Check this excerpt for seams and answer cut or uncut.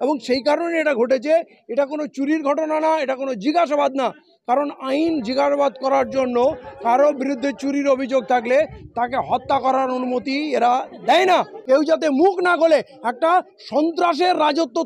cut